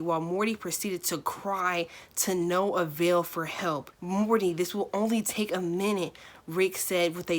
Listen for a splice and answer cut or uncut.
uncut